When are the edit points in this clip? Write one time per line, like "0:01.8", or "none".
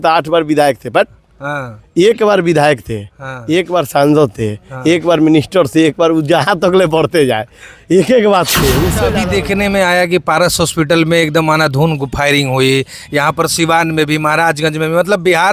0:09.0

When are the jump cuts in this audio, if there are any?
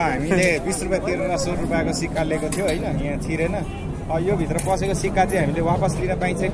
none

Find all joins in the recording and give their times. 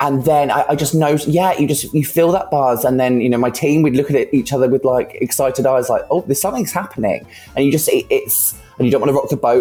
none

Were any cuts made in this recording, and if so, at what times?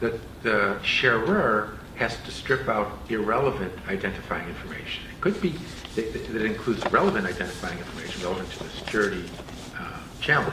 0:08.4

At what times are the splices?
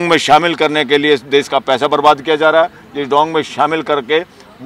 none

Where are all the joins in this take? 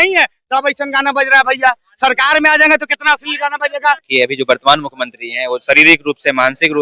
0:04.0

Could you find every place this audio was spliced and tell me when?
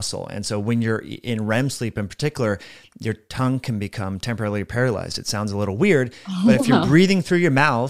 none

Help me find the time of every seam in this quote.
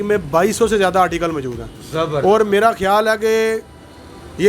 none

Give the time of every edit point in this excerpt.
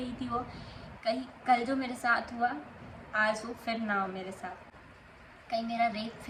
none

